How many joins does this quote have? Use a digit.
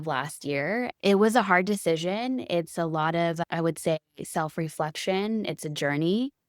1